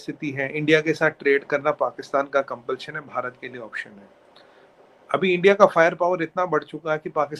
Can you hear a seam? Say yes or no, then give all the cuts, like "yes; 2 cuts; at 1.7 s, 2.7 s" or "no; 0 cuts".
no; 0 cuts